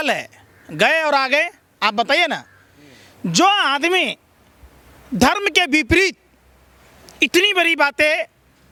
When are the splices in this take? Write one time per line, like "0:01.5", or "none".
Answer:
none